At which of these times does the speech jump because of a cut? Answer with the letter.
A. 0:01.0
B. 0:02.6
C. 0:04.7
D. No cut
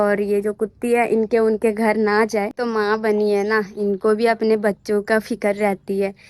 B